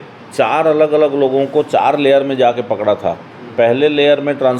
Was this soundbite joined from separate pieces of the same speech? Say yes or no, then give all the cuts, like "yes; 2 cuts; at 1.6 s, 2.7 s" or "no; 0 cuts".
no; 0 cuts